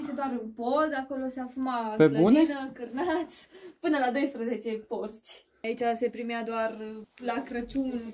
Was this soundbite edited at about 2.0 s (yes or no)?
no